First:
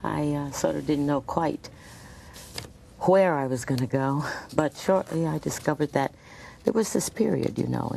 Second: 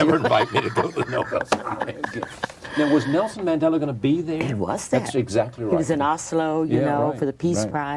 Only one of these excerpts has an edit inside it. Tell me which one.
second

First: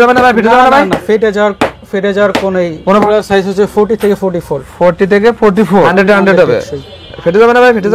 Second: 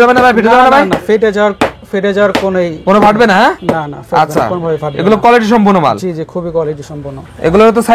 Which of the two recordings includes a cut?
first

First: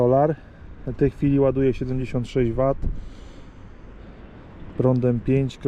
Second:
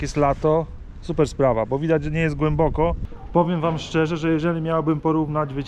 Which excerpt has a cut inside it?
second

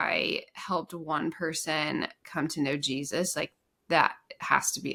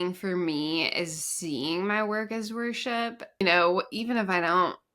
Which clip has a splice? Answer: second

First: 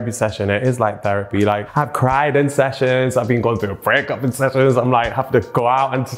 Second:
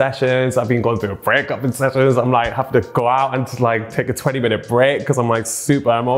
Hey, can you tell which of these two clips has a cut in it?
first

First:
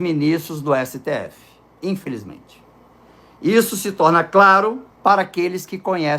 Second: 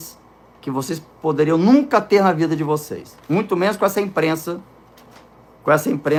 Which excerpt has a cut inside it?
first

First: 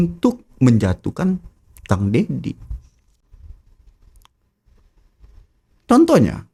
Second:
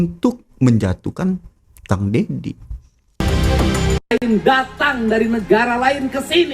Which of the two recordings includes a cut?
second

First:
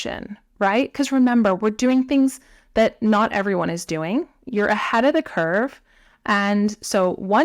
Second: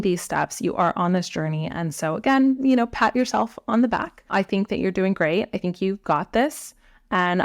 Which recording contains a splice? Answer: second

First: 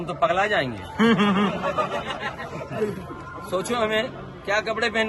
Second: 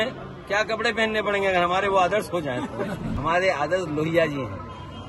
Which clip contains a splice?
second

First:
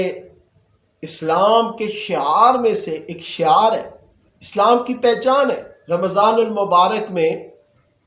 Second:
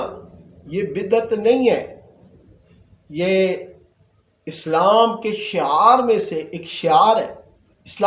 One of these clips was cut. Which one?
first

